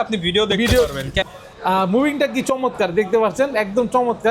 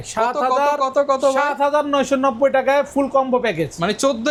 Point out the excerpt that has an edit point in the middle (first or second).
first